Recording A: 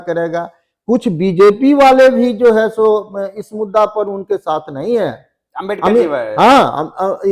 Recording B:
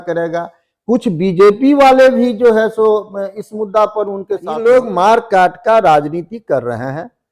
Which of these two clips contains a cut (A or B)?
B